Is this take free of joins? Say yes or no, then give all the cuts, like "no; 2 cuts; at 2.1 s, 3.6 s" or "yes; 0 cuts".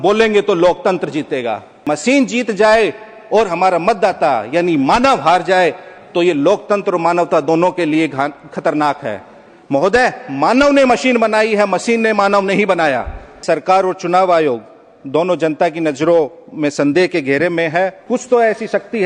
no; 3 cuts; at 1.7 s, 13.4 s, 18.0 s